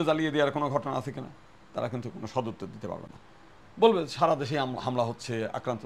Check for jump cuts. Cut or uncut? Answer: uncut